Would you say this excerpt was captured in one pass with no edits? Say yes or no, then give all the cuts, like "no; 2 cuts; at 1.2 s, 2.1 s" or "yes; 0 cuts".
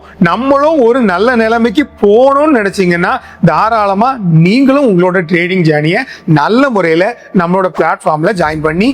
yes; 0 cuts